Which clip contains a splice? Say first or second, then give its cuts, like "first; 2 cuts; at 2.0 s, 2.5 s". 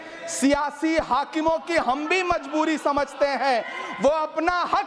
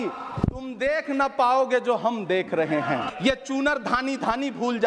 second; 1 cut; at 3.1 s